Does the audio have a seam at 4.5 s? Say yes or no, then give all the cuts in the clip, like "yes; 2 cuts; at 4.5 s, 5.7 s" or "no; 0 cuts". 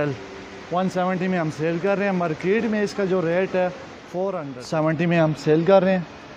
yes; 1 cut; at 4.5 s